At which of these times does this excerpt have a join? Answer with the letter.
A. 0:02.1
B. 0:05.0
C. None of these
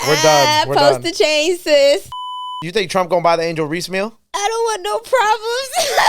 A